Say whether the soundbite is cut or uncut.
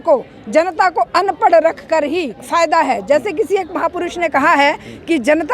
cut